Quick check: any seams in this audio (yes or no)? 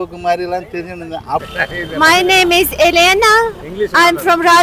yes